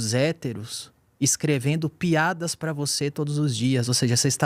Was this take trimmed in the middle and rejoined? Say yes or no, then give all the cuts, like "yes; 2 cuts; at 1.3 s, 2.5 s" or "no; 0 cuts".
no; 0 cuts